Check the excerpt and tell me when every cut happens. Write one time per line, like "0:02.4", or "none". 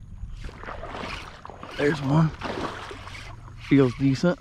none